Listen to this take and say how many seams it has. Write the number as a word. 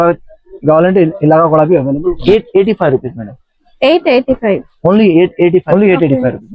two